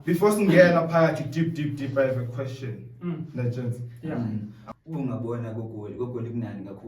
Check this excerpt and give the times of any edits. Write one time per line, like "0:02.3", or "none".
0:04.6